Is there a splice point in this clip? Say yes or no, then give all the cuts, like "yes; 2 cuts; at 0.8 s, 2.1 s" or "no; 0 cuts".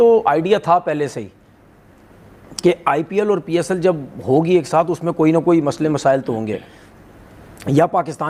no; 0 cuts